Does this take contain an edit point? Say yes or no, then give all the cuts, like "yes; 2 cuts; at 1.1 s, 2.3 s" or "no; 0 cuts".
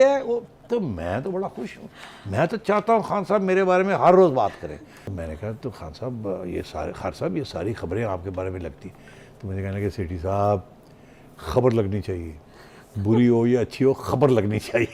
yes; 1 cut; at 5.1 s